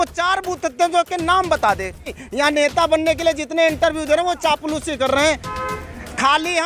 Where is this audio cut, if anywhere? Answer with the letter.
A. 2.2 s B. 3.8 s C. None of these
A